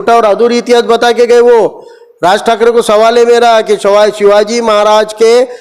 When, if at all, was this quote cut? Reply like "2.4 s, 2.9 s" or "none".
none